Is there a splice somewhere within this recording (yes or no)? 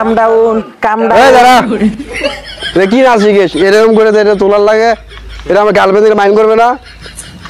no